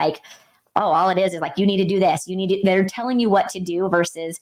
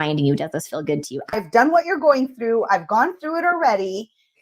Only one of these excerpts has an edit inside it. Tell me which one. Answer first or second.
second